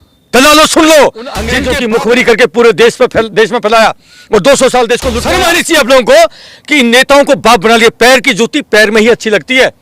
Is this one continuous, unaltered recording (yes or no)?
no